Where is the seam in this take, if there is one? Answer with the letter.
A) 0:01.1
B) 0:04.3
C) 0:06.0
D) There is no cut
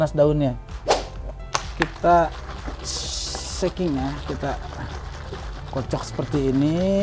A